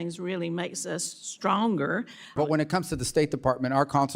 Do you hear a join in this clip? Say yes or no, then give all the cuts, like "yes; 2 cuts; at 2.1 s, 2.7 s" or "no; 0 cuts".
yes; 1 cut; at 2.3 s